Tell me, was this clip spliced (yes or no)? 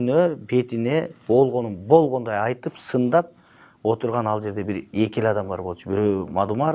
no